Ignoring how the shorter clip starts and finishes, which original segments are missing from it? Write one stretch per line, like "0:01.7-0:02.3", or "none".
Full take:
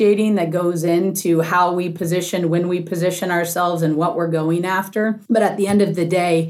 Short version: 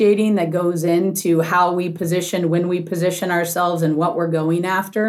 none